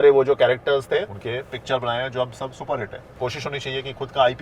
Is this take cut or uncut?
cut